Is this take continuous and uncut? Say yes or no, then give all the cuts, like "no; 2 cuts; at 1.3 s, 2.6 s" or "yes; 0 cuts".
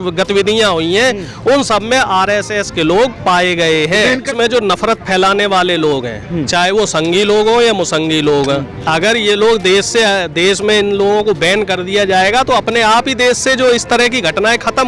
no; 1 cut; at 4.3 s